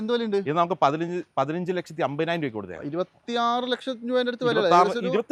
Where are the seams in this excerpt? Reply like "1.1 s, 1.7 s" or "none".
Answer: none